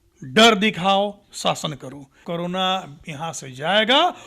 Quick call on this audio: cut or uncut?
cut